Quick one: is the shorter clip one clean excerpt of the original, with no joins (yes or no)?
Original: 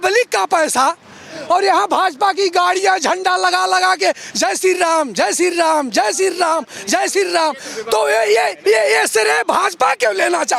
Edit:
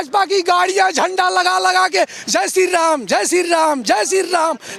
yes